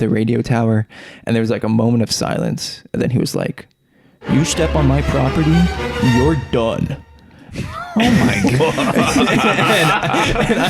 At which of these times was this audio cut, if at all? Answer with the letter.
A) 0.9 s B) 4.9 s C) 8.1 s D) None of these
D